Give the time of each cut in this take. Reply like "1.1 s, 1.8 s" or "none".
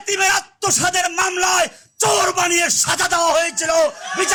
none